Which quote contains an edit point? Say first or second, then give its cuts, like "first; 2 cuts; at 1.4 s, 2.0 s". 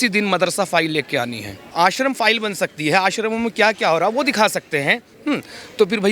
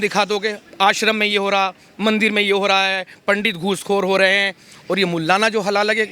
first; 1 cut; at 1.7 s